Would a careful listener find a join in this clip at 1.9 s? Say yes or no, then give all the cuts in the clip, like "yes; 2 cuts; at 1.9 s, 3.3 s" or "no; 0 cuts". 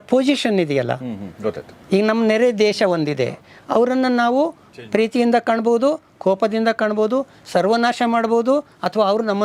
no; 0 cuts